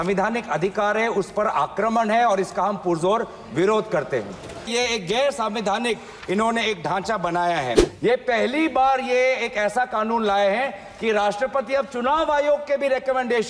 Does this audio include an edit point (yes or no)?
yes